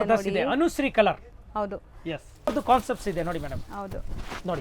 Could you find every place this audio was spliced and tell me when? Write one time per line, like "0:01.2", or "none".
0:02.5